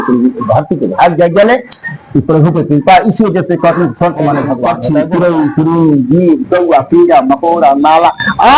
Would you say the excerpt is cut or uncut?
cut